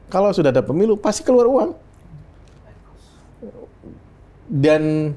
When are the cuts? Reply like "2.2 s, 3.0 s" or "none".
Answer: none